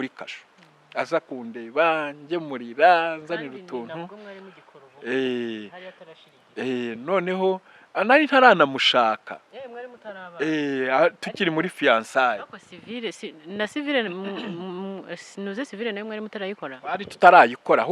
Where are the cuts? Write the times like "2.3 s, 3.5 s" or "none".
none